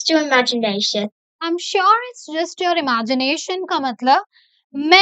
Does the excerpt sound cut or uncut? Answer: cut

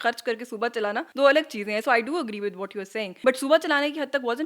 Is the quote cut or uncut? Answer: cut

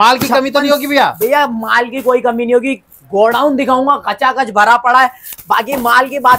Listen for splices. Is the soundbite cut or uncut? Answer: uncut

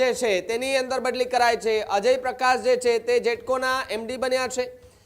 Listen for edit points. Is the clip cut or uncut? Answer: uncut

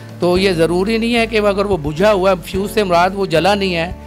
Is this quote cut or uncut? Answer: uncut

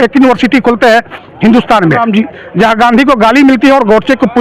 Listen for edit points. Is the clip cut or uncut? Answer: cut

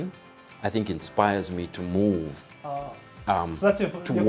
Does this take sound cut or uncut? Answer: uncut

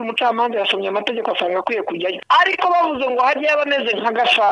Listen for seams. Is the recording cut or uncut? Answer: cut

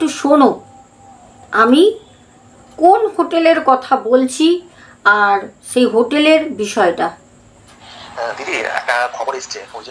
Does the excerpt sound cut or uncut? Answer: uncut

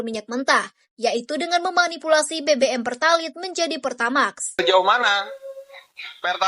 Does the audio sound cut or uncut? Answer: cut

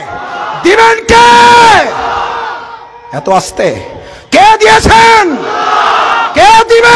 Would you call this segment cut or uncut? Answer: uncut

